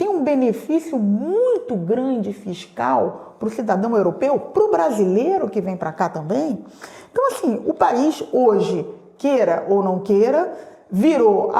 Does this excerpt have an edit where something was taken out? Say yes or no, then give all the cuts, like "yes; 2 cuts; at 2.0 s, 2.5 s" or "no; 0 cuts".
no; 0 cuts